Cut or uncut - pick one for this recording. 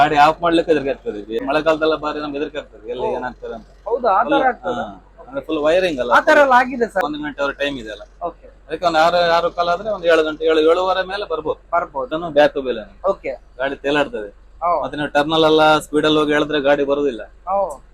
cut